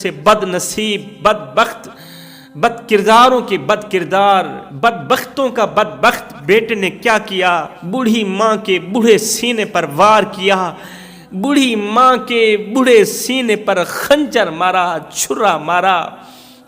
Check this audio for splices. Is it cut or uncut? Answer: uncut